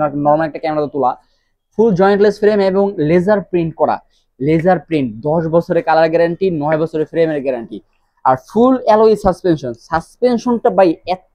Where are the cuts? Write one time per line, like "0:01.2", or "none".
none

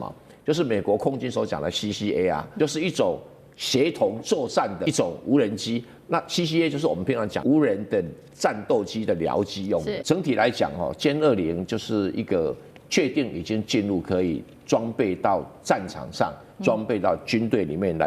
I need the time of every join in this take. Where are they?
0:02.5
0:04.8
0:07.3
0:10.0

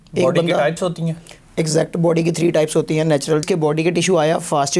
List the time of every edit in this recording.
0:03.4

